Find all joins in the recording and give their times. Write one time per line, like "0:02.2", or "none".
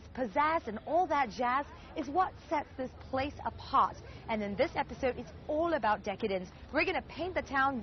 0:04.7

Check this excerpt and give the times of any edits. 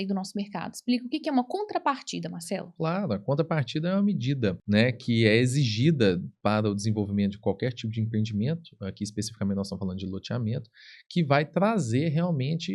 0:04.6

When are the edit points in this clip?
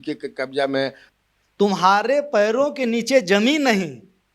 0:01.0

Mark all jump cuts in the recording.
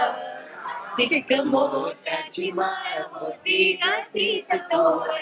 none

